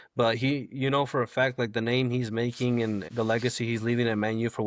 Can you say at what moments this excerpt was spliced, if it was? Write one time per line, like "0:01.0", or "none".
0:03.1